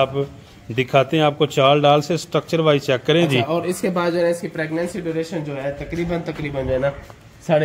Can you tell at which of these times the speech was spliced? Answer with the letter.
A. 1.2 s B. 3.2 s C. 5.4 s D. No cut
D